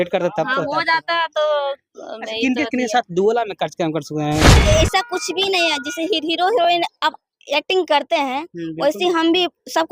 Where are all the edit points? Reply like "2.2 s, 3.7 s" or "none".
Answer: 4.5 s

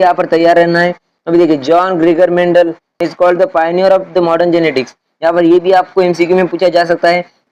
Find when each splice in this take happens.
none

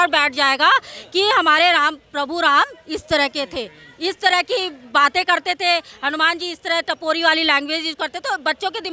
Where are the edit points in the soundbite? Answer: none

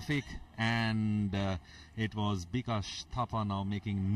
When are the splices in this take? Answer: none

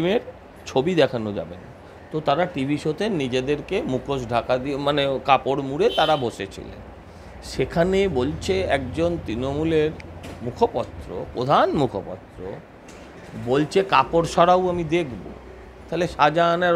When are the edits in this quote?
none

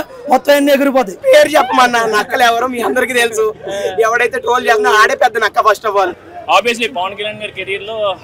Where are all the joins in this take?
1.2 s, 6.1 s

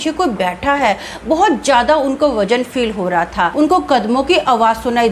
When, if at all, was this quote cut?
3.5 s

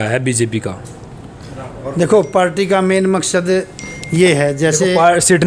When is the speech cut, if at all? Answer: none

